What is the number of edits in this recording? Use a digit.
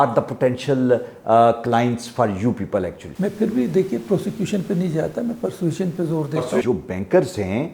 2